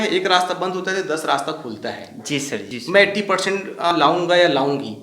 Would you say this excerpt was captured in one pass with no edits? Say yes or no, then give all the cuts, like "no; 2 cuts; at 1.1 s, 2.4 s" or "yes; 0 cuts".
no; 2 cuts; at 2.6 s, 3.9 s